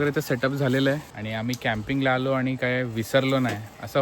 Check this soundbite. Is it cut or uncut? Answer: cut